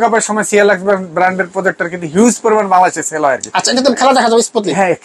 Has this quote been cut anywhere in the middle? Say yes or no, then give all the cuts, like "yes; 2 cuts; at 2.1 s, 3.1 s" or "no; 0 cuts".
no; 0 cuts